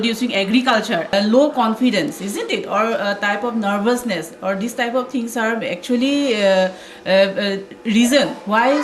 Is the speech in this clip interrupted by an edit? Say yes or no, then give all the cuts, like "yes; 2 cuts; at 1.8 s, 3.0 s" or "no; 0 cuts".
yes; 1 cut; at 1.1 s